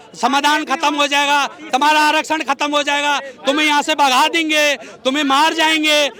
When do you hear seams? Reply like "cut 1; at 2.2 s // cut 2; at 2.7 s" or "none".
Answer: none